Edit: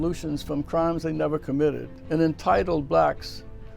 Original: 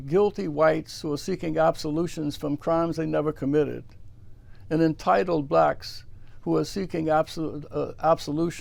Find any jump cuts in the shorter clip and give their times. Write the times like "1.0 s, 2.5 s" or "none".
1.9 s